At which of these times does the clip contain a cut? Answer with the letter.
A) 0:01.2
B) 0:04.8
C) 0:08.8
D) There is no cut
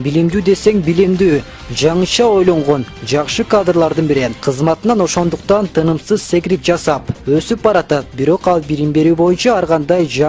B